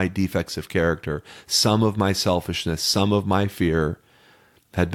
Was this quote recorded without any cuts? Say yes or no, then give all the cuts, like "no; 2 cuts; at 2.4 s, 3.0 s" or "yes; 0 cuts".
yes; 0 cuts